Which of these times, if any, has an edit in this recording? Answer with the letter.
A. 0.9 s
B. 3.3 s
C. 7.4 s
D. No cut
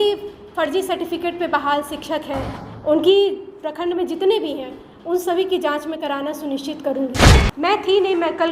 C